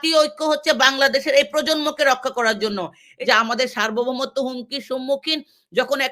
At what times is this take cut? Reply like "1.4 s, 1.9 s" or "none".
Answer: 3.1 s